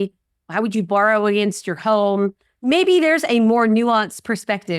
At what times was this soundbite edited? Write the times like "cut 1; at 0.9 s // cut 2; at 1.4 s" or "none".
cut 1; at 2.5 s